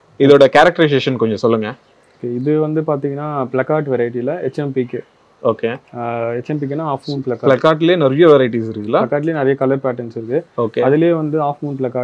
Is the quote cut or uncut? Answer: uncut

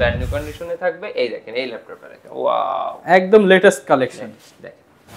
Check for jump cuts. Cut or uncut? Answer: uncut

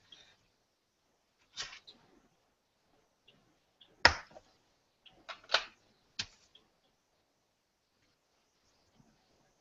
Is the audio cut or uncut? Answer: uncut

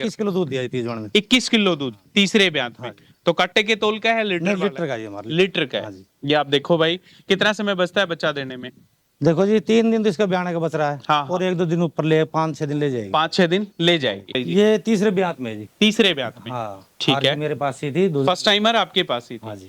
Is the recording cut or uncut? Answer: cut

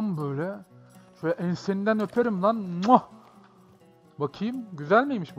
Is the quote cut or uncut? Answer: uncut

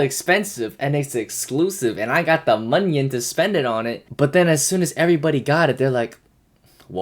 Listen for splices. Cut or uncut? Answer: cut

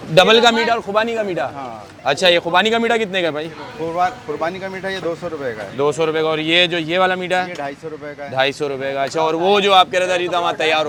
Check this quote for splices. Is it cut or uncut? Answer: uncut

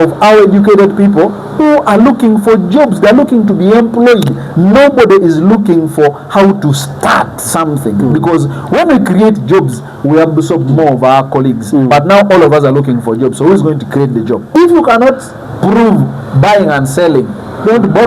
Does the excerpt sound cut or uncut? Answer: cut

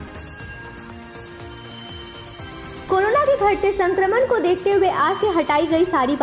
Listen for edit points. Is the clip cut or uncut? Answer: cut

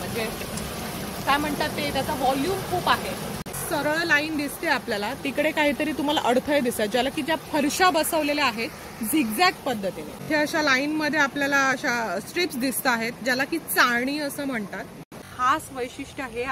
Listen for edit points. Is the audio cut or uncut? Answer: cut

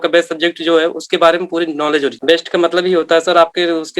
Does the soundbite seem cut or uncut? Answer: cut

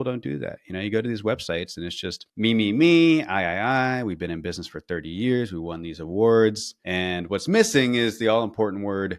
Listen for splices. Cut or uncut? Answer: uncut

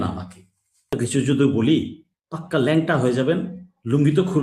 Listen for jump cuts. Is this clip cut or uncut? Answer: cut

